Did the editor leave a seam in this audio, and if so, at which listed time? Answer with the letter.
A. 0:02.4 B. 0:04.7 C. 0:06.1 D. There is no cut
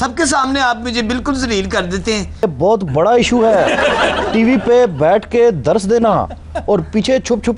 A